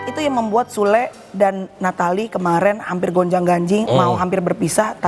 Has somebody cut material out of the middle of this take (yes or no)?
no